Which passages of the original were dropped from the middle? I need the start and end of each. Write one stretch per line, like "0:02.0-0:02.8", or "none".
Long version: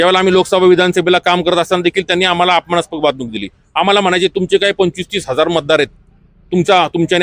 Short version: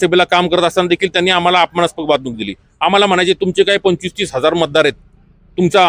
none